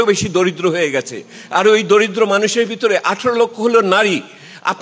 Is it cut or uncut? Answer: uncut